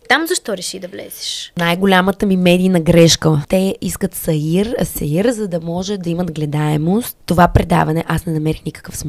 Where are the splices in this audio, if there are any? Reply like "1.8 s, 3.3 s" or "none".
1.6 s, 3.4 s, 7.1 s